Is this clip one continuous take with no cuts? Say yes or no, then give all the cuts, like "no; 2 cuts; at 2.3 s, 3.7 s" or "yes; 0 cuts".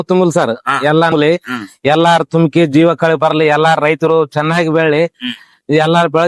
no; 1 cut; at 1.1 s